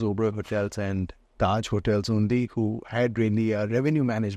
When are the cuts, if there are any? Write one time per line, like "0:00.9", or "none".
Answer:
none